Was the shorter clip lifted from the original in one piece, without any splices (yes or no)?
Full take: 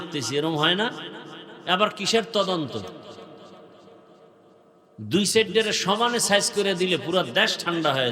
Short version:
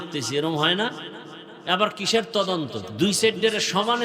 no